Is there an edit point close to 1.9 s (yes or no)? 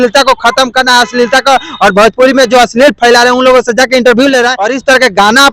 no